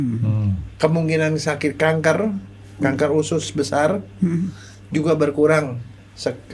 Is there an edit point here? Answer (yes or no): no